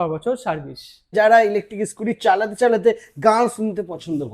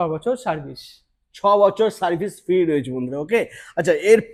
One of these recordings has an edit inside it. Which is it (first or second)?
first